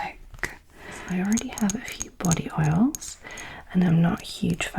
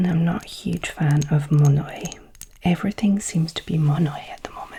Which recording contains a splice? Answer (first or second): first